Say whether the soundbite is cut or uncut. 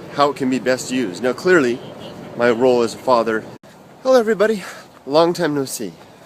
uncut